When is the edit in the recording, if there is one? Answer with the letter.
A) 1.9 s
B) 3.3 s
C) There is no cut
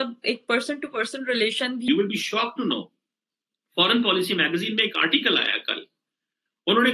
A